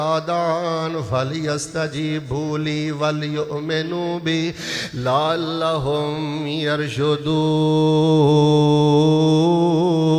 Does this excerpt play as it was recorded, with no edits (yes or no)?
yes